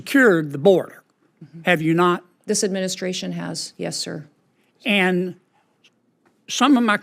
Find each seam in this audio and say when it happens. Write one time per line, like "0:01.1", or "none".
none